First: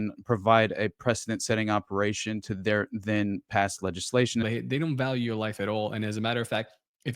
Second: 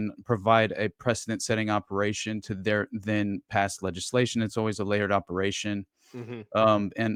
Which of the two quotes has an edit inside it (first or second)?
first